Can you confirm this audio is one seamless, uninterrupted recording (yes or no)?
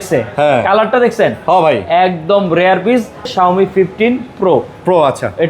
no